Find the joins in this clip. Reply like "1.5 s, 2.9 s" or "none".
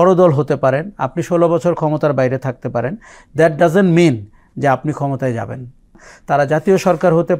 6.1 s